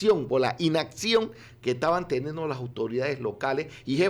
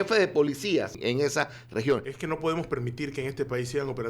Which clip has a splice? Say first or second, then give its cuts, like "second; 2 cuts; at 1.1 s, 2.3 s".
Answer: second; 2 cuts; at 1.0 s, 2.1 s